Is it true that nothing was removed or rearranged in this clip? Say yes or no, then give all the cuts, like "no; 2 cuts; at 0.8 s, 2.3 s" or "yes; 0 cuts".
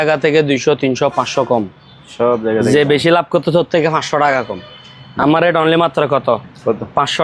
yes; 0 cuts